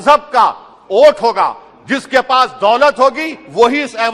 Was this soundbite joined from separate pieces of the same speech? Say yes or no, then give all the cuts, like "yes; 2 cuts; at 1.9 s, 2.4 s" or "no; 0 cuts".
no; 0 cuts